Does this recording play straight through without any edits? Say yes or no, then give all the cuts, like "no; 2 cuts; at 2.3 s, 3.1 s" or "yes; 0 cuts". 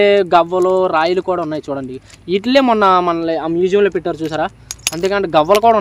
yes; 0 cuts